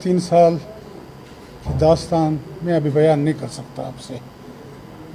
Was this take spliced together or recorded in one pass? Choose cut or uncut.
uncut